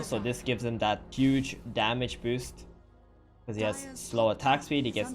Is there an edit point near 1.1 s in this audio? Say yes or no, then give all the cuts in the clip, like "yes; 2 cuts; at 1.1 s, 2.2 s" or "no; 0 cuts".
yes; 1 cut; at 1.1 s